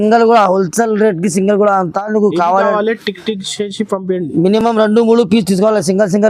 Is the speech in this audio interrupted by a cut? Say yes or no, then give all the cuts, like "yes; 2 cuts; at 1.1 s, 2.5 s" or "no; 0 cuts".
no; 0 cuts